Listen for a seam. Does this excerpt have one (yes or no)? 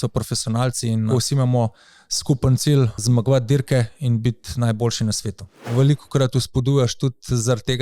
yes